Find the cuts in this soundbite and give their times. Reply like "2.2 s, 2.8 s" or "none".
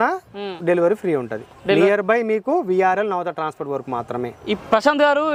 none